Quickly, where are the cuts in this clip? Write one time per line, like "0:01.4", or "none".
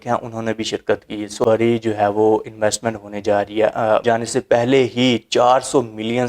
0:01.4
0:04.0